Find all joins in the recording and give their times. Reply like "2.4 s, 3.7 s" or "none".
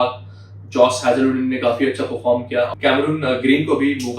2.7 s